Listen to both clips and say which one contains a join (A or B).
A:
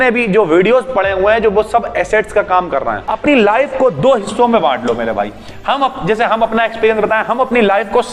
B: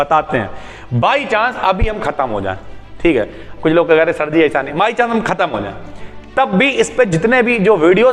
A